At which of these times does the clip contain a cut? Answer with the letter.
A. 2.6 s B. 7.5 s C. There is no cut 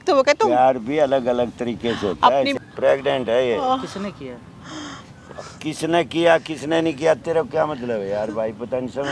A